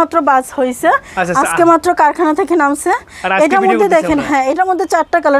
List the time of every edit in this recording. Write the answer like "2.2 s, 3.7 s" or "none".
none